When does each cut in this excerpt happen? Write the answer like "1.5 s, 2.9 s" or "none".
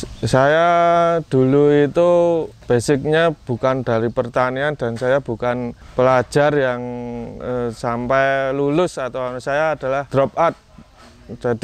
2.6 s, 5.8 s, 10.1 s